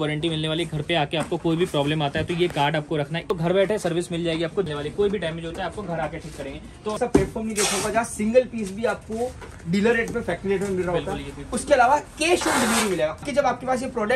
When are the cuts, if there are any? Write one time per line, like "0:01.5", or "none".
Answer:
0:03.3
0:04.7
0:07.0
0:13.3